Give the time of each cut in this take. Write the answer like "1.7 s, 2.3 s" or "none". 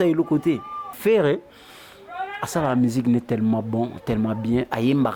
1.0 s